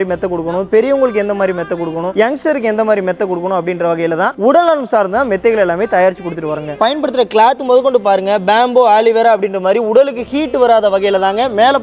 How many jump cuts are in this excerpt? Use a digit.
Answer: 1